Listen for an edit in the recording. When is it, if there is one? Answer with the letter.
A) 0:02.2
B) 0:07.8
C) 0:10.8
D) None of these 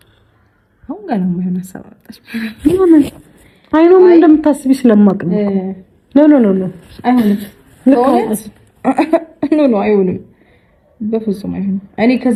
D